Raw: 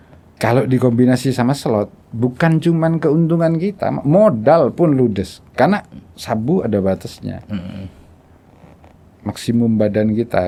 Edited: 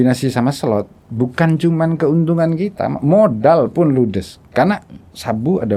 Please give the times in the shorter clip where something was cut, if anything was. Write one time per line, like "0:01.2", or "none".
none